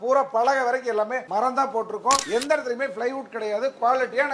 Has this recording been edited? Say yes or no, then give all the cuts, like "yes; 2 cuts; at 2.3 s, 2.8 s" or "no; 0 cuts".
yes; 1 cut; at 2.2 s